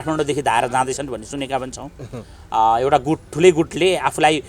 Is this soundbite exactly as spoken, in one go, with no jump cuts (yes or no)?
yes